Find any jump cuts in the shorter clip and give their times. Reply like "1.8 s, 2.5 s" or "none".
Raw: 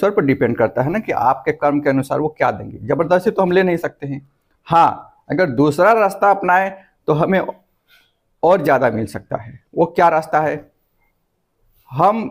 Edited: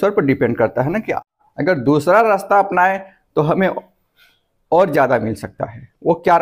1.2 s